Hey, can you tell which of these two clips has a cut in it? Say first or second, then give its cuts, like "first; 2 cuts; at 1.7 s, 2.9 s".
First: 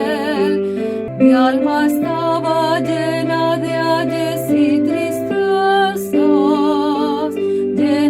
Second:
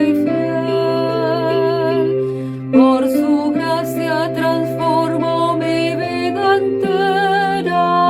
first; 1 cut; at 1.1 s